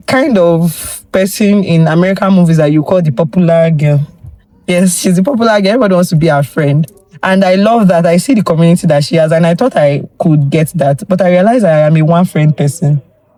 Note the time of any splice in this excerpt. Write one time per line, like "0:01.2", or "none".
none

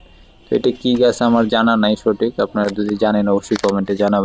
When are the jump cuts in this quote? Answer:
none

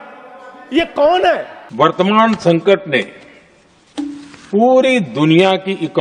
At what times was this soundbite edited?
0:01.6

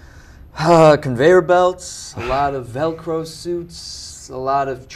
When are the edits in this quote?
none

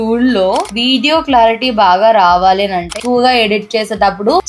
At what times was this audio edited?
0:03.0

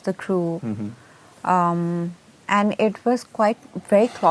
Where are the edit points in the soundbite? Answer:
none

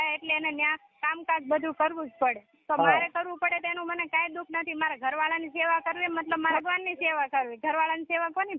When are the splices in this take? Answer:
0:06.5

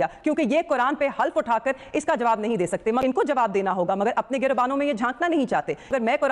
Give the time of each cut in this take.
none

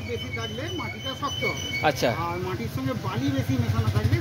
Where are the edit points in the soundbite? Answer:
none

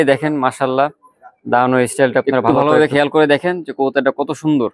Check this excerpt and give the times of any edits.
0:02.5

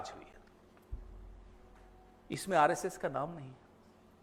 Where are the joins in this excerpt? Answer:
none

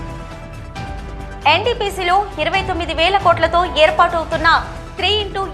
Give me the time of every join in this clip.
0:01.2

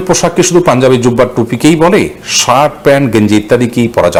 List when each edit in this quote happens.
none

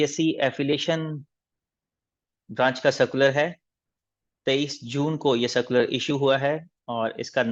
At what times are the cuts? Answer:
none

